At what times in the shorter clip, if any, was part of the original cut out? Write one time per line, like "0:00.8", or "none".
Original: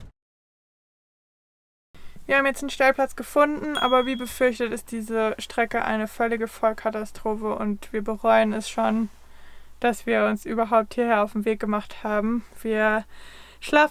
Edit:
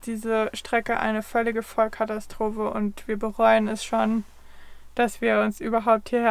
none